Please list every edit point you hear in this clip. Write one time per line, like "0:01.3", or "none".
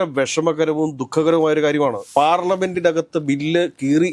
0:02.0